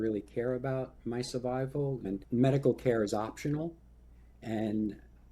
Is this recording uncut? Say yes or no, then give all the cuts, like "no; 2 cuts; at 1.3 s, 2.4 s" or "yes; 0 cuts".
no; 1 cut; at 2.2 s